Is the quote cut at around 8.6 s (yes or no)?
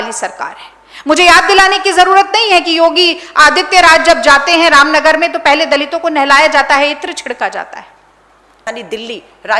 yes